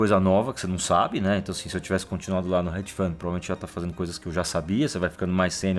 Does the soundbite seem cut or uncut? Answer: uncut